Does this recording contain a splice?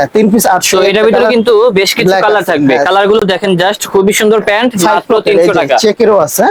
no; 0 cuts

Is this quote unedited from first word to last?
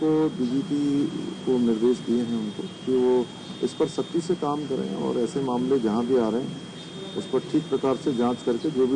yes; 0 cuts

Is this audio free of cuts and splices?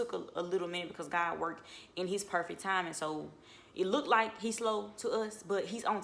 yes; 0 cuts

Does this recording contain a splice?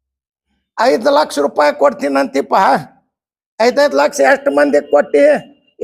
no; 0 cuts

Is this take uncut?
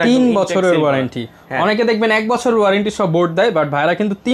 yes; 0 cuts

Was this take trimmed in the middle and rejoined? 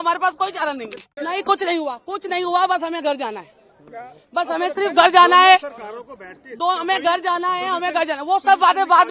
yes; 1 cut; at 1.0 s

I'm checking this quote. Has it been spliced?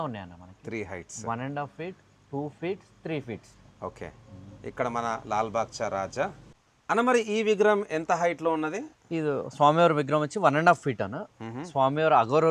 no; 0 cuts

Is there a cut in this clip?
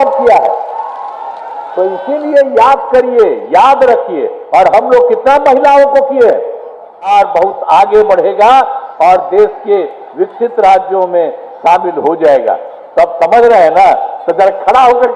yes; 1 cut; at 7.1 s

